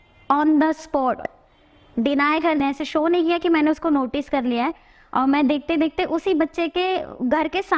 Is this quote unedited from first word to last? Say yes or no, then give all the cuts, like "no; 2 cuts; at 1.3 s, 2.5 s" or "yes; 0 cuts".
no; 1 cut; at 2.6 s